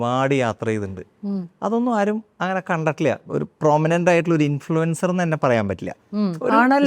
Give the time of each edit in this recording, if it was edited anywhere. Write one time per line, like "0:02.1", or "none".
0:03.2